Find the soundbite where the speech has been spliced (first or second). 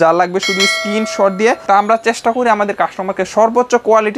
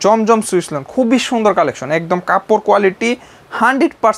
first